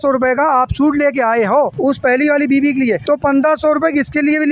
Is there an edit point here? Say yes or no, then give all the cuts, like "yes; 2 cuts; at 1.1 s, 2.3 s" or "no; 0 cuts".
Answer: yes; 2 cuts; at 1.7 s, 3.0 s